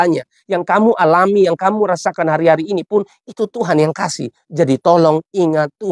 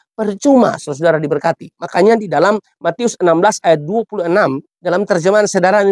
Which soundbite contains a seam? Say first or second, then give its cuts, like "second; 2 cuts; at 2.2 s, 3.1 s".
second; 2 cuts; at 1.8 s, 4.7 s